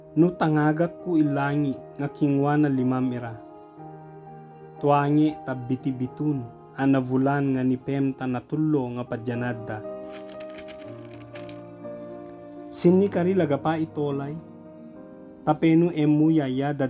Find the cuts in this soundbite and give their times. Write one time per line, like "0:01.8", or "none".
0:03.4
0:04.8
0:09.5
0:12.8